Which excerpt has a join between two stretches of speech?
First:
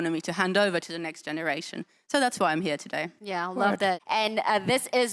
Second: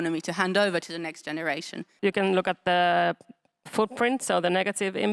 second; 1 cut; at 1.9 s

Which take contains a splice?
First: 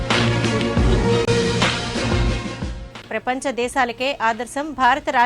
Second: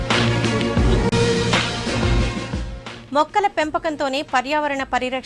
second; 1 cut; at 1.0 s

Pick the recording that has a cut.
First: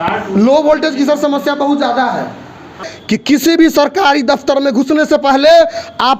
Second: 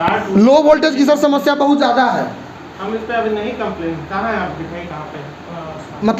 first; 1 cut; at 2.9 s

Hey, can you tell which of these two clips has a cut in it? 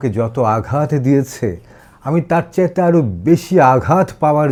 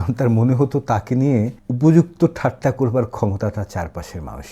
second; 1 cut; at 1.6 s

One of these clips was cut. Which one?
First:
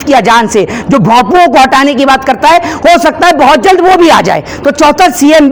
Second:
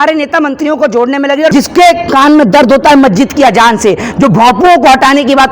second; 1 cut; at 1.5 s

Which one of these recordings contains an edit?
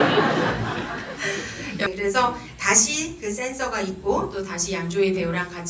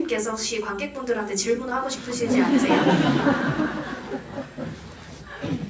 first; 1 cut; at 1.9 s

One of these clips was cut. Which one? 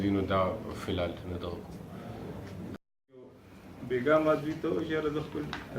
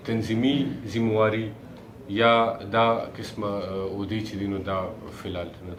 first; 1 cut; at 2.8 s

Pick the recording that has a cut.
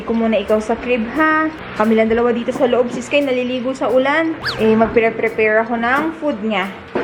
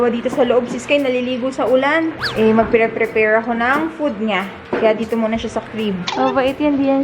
second; 1 cut; at 6.1 s

